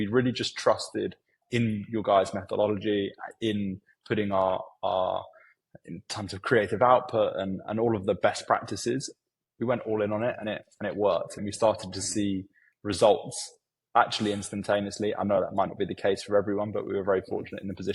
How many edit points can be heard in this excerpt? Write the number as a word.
one